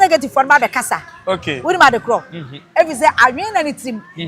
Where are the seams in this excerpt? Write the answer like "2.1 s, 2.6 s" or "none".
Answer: none